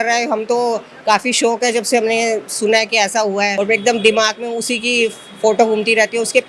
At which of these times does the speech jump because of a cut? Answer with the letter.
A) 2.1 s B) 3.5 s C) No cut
B